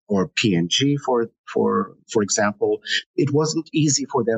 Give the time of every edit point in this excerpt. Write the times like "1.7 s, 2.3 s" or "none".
none